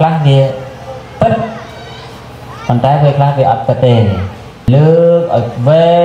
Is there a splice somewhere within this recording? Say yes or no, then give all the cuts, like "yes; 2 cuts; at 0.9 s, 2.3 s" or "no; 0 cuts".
yes; 1 cut; at 4.7 s